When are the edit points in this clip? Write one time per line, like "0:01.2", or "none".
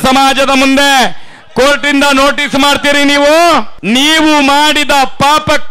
0:03.7

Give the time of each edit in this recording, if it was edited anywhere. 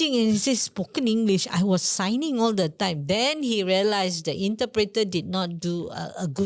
none

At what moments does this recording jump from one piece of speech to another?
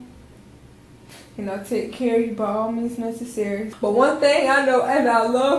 0:03.7

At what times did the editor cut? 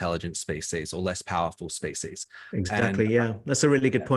none

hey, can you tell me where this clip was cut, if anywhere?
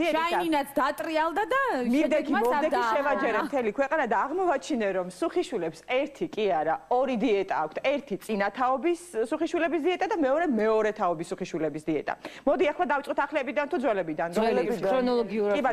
0:14.3

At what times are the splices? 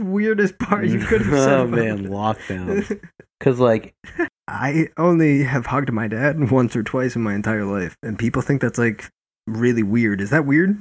0:04.4

